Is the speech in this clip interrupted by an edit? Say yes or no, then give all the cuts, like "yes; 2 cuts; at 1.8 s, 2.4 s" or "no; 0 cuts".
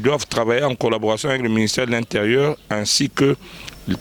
no; 0 cuts